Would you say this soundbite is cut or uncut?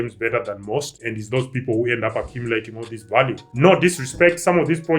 cut